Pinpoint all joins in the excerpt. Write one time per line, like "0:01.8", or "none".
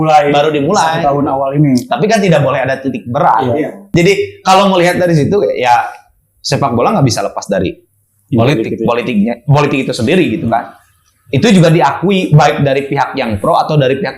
0:03.8